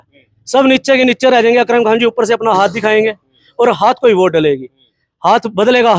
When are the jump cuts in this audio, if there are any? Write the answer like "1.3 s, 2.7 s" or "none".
none